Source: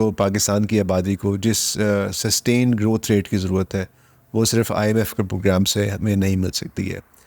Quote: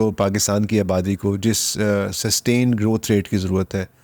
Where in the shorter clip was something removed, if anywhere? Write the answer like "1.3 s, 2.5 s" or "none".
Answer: none